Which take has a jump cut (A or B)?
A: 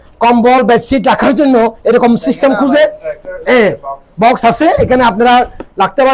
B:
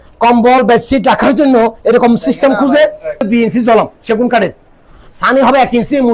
B